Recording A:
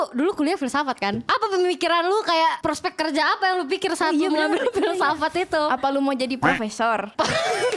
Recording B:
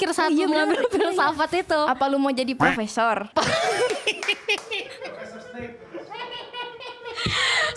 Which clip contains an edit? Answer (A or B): A